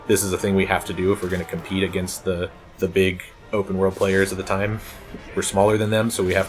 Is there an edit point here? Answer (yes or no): yes